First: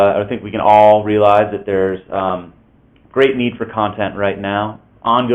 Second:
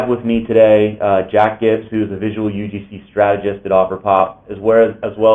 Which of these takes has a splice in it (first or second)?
second